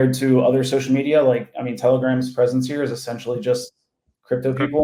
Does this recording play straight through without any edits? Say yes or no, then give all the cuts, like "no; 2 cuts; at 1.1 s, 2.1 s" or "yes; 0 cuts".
yes; 0 cuts